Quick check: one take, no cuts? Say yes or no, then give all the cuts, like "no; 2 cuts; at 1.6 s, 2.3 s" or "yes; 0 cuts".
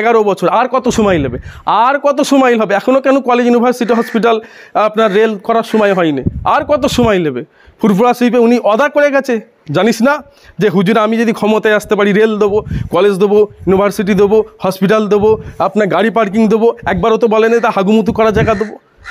yes; 0 cuts